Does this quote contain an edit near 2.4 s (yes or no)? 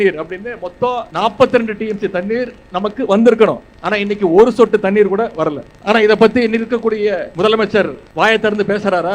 no